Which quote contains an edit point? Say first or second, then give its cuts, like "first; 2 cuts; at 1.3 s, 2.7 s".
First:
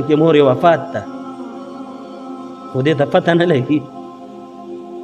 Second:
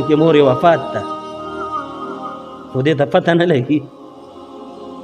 first; 2 cuts; at 1.0 s, 2.6 s